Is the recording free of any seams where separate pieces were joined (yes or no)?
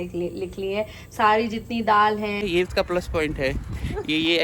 no